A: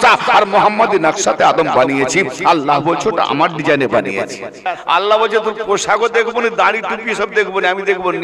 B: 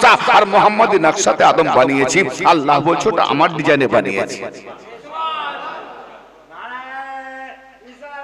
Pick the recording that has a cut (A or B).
A